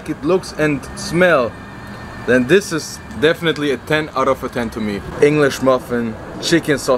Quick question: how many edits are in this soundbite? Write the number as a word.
one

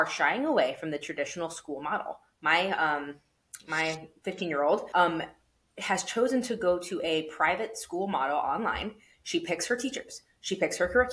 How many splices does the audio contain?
one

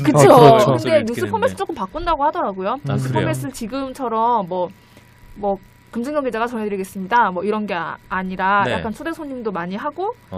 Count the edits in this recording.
one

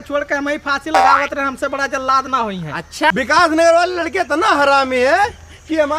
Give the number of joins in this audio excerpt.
one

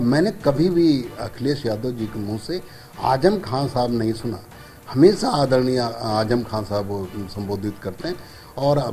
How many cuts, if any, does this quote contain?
zero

